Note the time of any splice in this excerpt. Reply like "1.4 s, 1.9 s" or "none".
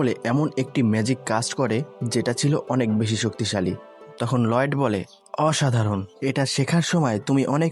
4.1 s